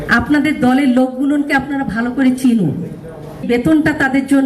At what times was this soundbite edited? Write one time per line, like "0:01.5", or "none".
0:03.3